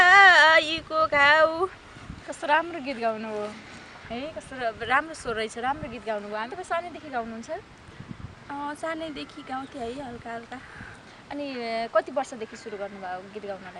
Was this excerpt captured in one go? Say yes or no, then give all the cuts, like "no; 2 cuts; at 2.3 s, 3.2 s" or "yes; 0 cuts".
yes; 0 cuts